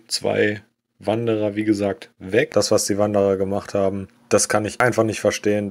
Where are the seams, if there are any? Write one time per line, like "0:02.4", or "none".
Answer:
0:02.5